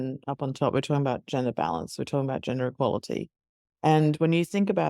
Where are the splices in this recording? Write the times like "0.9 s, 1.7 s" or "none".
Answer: none